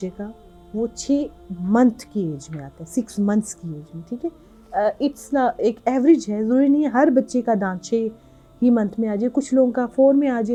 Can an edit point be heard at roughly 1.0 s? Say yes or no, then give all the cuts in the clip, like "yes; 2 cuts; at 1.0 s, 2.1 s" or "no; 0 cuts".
no; 0 cuts